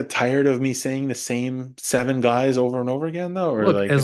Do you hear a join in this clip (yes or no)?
no